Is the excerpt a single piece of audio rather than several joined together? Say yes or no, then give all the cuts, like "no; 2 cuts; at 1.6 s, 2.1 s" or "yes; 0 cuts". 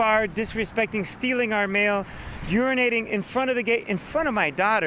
yes; 0 cuts